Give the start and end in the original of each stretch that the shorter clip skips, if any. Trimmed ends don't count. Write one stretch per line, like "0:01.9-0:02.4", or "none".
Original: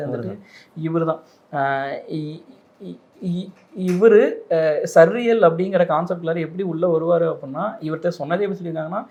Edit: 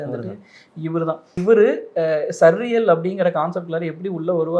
0:01.4-0:03.9